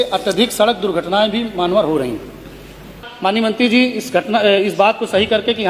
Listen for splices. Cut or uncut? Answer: cut